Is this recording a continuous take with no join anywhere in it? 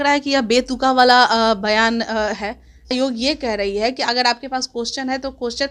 no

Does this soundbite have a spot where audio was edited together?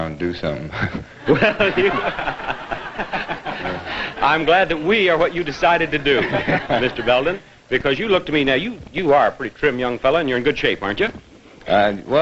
yes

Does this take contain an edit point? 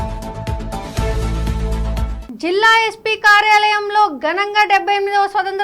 yes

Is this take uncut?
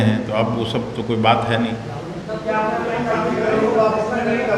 yes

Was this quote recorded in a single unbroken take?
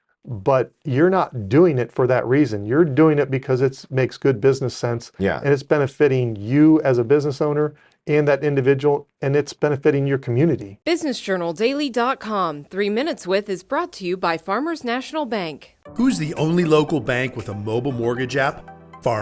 no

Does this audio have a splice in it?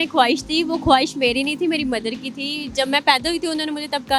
no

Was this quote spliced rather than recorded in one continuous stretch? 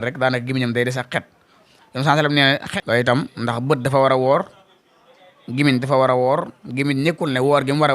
yes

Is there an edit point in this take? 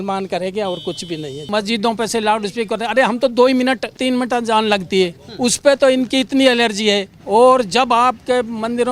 yes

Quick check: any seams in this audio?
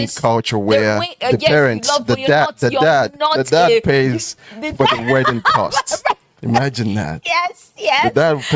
no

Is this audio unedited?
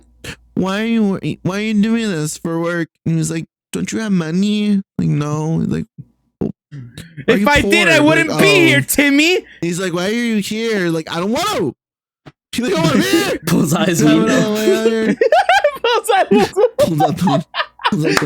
no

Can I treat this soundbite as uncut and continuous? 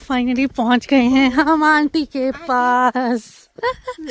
yes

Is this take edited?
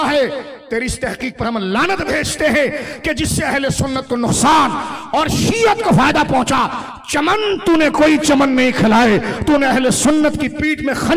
no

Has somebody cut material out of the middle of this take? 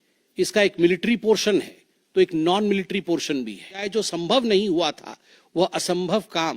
yes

